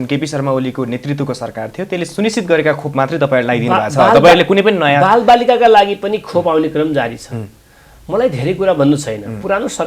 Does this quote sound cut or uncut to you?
uncut